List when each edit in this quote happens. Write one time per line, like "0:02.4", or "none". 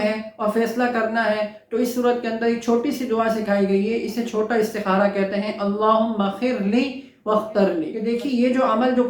0:07.9